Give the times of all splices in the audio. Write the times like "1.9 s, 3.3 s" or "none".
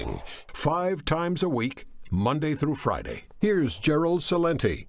2.6 s